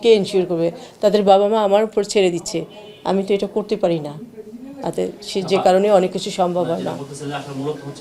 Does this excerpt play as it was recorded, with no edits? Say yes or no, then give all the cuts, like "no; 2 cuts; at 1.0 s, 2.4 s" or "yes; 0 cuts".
yes; 0 cuts